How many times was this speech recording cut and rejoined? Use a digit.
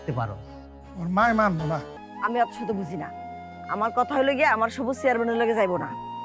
1